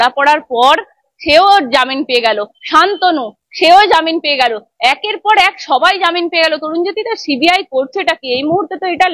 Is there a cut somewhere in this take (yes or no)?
no